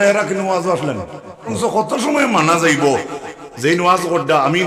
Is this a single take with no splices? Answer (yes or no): no